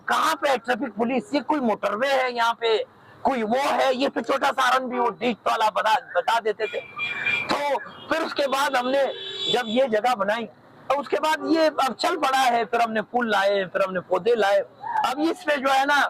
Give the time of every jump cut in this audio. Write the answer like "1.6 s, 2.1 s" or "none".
none